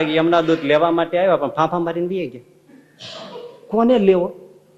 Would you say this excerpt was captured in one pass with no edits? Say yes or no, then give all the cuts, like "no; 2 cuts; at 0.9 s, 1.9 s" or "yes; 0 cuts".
yes; 0 cuts